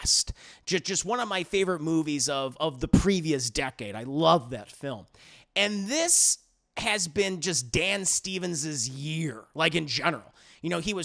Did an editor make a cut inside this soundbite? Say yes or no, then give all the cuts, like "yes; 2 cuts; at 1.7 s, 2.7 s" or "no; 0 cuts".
no; 0 cuts